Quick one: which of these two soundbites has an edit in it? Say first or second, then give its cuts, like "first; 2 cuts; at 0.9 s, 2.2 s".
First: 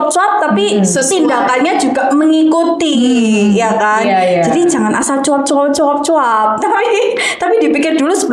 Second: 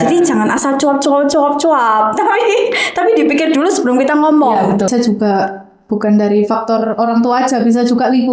second; 1 cut; at 4.9 s